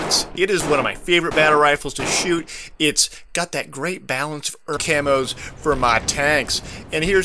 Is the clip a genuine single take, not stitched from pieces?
yes; 0 cuts

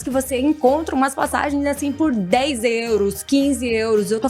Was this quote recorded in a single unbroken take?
yes; 0 cuts

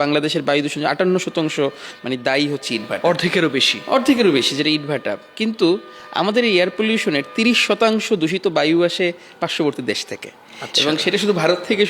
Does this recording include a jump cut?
no; 0 cuts

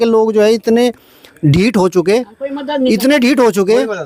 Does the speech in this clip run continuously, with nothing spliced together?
yes; 0 cuts

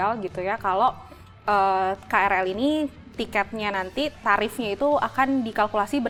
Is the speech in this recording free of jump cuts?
yes; 0 cuts

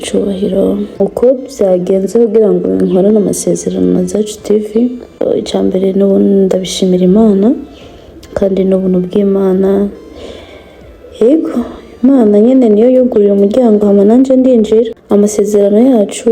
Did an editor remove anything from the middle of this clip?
yes; 3 cuts; at 0.9 s, 5.2 s, 15.0 s

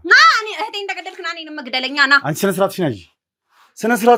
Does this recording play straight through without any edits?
yes; 0 cuts

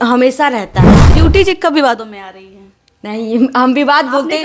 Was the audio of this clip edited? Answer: yes; 1 cut; at 1.0 s

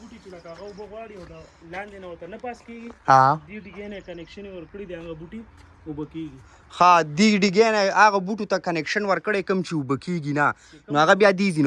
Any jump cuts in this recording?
no; 0 cuts

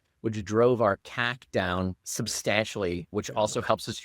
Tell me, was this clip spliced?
yes; 2 cuts; at 2.0 s, 3.0 s

